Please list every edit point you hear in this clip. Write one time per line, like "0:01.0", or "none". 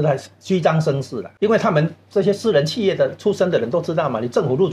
0:01.2